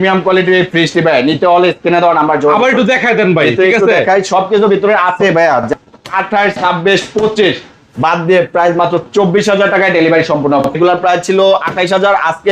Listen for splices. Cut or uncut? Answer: cut